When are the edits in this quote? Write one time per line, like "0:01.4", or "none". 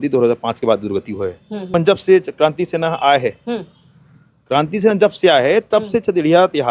0:01.7